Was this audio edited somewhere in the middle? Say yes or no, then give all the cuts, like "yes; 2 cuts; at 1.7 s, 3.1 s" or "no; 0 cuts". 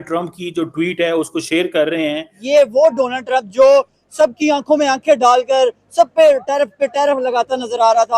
yes; 1 cut; at 2.4 s